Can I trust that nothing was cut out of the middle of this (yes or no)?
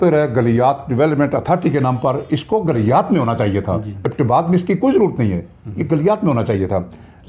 yes